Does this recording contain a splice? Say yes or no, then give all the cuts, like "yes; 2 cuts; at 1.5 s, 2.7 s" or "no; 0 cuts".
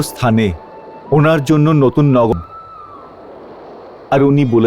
yes; 1 cut; at 2.3 s